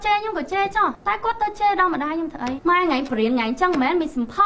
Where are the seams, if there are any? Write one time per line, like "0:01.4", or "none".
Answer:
0:01.0
0:02.6